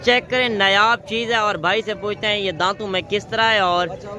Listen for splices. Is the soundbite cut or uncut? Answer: uncut